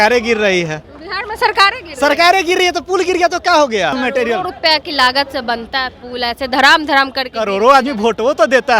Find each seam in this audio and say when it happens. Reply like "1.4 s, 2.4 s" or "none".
4.0 s